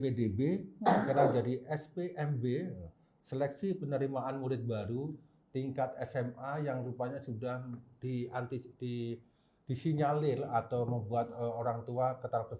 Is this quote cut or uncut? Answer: uncut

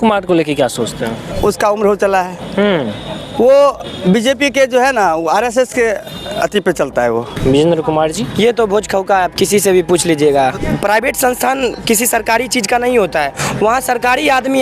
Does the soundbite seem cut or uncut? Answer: cut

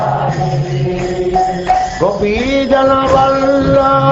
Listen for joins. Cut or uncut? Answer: cut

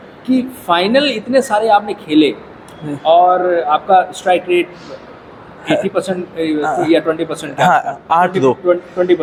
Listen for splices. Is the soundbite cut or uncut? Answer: uncut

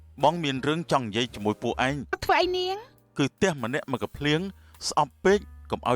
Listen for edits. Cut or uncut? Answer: cut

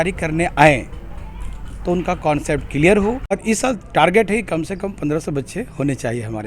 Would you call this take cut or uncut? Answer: cut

